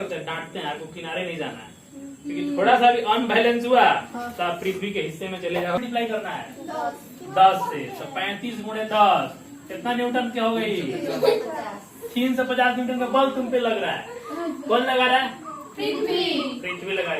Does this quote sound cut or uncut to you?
cut